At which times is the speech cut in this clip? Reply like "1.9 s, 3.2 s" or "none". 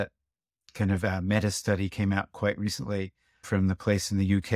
none